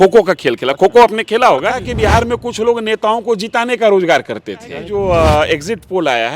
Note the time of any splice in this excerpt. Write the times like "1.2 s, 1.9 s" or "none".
1.8 s, 4.8 s